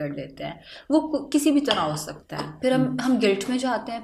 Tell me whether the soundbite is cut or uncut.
uncut